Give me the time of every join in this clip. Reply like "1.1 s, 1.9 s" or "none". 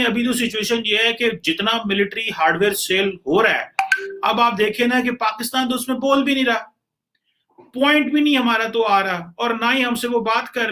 none

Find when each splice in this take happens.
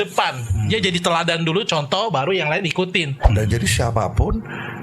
3.2 s

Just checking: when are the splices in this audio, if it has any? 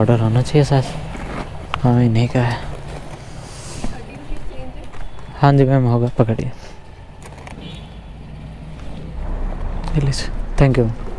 none

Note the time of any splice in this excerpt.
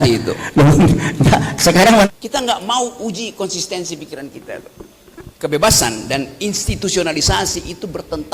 2.1 s, 5.3 s

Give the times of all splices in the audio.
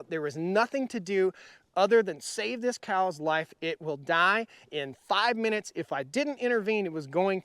none

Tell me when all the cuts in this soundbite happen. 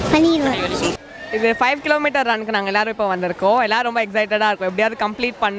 0.9 s

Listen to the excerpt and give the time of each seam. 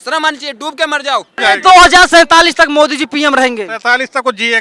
1.4 s

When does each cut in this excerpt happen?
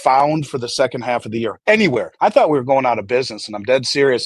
1.6 s, 2.1 s

